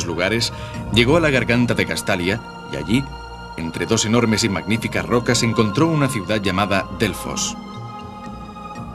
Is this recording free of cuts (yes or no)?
no